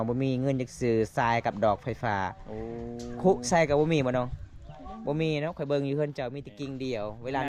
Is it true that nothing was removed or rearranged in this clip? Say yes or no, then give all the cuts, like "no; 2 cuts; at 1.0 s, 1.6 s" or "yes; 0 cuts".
yes; 0 cuts